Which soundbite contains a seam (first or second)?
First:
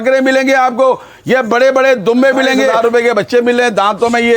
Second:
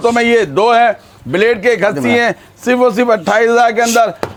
first